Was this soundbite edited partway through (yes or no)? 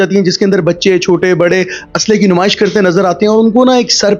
no